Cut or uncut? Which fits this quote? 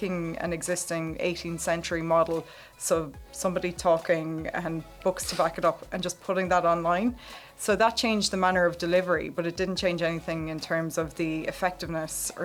uncut